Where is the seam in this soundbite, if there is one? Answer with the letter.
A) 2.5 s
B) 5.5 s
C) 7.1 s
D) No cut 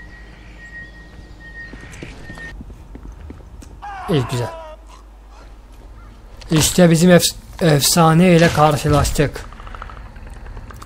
A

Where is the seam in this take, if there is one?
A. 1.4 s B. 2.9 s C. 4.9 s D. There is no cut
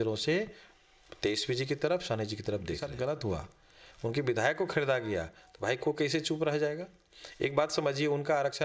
B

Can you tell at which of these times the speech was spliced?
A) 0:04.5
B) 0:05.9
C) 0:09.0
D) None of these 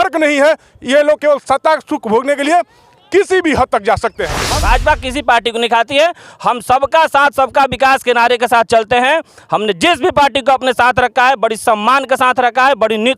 A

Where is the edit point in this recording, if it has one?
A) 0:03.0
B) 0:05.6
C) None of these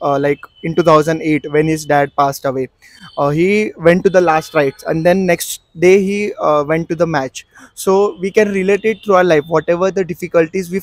C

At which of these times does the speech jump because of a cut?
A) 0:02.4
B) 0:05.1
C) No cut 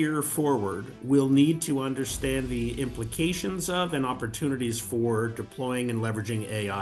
C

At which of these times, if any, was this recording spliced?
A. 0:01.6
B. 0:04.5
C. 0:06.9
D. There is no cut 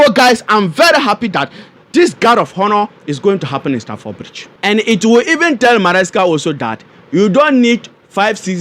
B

